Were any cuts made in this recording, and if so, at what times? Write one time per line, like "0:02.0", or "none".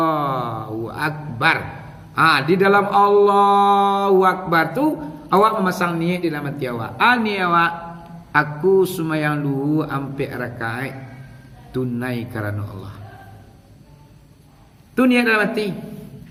none